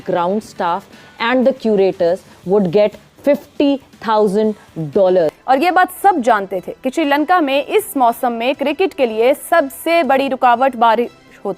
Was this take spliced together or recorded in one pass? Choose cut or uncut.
cut